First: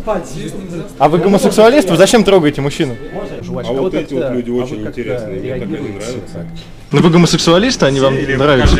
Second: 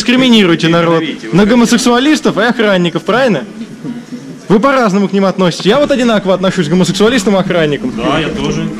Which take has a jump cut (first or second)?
first